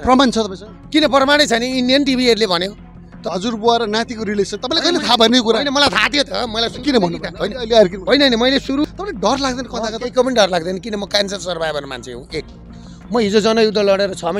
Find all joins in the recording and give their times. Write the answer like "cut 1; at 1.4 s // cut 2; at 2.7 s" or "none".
cut 1; at 3.3 s // cut 2; at 8.8 s